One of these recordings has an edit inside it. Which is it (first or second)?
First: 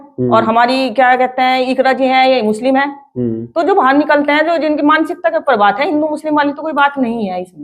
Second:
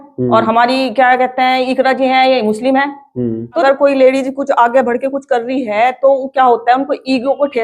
second